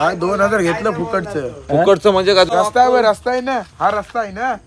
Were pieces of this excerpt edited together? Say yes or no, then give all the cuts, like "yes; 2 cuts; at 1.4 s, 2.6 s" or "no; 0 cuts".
yes; 1 cut; at 2.5 s